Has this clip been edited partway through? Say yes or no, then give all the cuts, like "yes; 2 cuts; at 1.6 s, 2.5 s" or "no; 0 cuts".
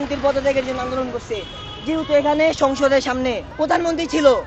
yes; 1 cut; at 3.5 s